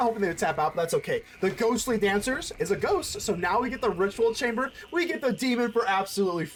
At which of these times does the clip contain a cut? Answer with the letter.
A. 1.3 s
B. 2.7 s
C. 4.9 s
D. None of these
D